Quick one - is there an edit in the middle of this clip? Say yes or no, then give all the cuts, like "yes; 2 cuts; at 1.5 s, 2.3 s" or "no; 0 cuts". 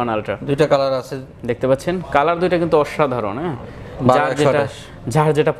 no; 0 cuts